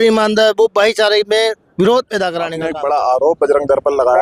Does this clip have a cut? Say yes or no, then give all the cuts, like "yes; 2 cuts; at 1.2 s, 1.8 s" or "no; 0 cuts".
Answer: yes; 1 cut; at 2.6 s